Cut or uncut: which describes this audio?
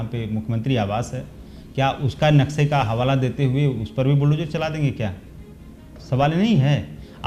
uncut